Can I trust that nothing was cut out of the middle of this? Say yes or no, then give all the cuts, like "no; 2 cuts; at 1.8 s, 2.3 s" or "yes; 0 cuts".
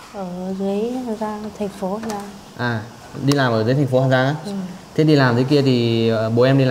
yes; 0 cuts